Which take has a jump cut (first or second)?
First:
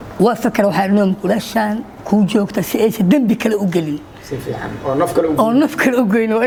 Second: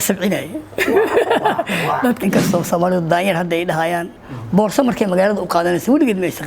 second